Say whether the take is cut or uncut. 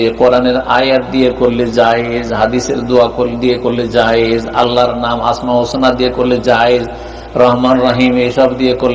uncut